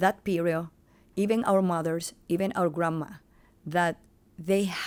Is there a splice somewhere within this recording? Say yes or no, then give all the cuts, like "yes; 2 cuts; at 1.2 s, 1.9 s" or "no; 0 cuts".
no; 0 cuts